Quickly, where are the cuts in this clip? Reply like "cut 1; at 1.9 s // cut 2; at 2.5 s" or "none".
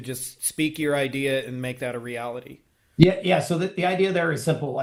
none